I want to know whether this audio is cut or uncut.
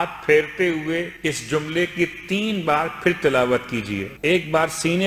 cut